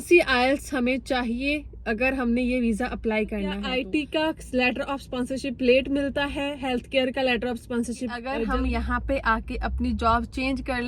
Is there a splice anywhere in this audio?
yes; 2 cuts; at 3.7 s, 8.3 s

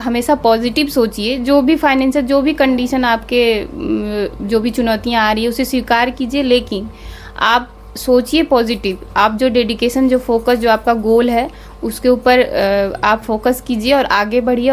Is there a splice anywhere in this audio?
no; 0 cuts

